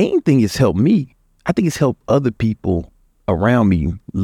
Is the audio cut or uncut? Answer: uncut